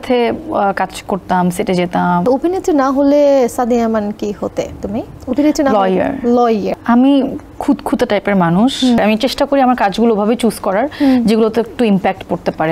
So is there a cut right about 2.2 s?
yes; 4 cuts; at 2.2 s, 5.2 s, 6.8 s, 9.0 s

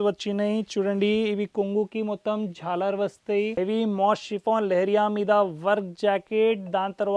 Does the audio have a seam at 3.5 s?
yes; 1 cut; at 3.5 s

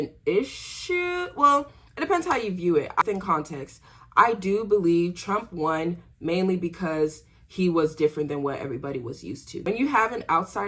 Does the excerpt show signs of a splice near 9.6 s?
yes; 2 cuts; at 3.0 s, 9.6 s

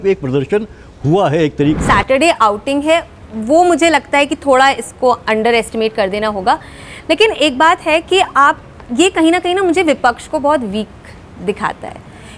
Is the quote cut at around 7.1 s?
no; 1 cut; at 1.8 s

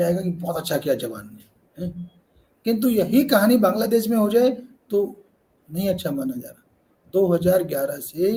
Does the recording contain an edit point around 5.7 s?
no; 0 cuts

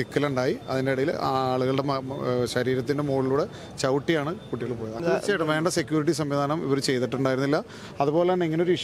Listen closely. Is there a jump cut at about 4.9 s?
yes; 1 cut; at 4.9 s

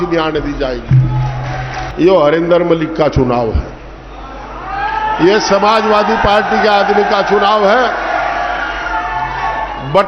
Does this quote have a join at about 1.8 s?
yes; 1 cut; at 1.8 s

